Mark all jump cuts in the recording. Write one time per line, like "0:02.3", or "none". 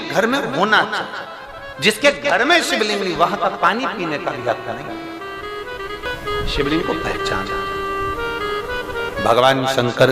0:06.1